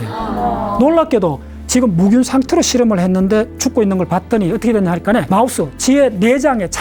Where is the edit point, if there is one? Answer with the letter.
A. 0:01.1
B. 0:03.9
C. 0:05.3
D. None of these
C